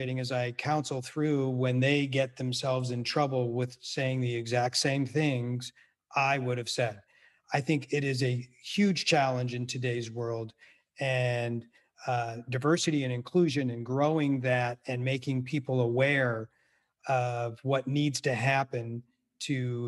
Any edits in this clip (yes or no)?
no